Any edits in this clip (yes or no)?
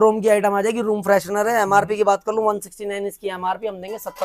no